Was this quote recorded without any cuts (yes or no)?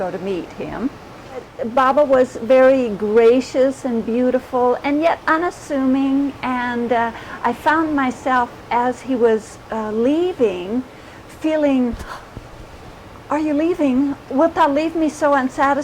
no